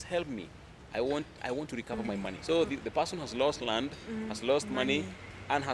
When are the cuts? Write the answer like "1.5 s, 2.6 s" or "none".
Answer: 2.3 s